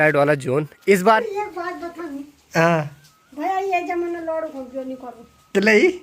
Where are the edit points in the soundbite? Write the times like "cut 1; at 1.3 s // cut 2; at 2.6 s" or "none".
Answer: cut 1; at 1.2 s